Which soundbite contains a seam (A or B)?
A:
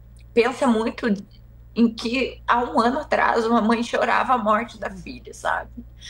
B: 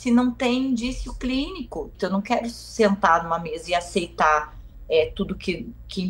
B